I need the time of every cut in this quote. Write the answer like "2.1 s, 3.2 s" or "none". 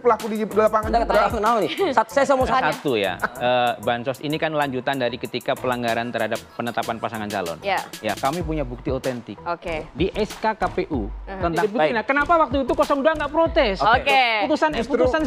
2.5 s, 8.2 s, 11.6 s